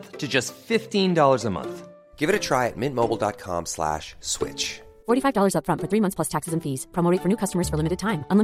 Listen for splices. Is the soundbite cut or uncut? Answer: uncut